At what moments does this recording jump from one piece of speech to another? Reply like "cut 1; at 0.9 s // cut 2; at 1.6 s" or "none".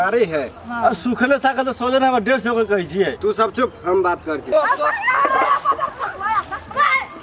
cut 1; at 3.1 s // cut 2; at 4.4 s